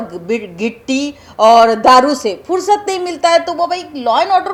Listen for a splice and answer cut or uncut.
uncut